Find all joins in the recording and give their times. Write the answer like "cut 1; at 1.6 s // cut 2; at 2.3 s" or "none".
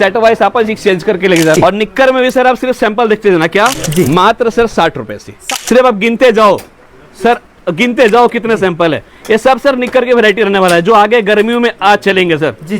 cut 1; at 1.6 s // cut 2; at 3.8 s // cut 3; at 5.3 s